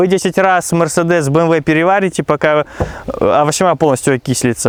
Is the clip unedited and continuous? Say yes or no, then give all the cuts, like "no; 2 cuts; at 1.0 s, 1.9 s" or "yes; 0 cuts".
yes; 0 cuts